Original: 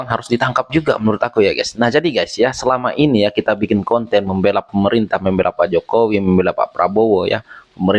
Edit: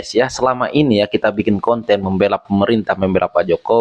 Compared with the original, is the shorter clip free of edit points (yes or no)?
yes